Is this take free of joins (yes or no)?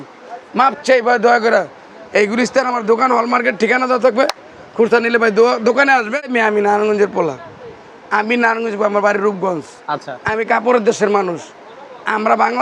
no